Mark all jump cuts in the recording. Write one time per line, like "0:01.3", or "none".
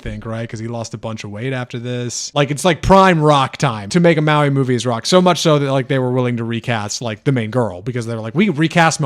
0:02.3
0:03.8